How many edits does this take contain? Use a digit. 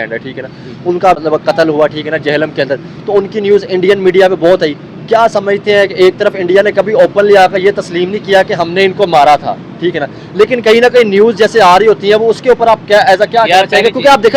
1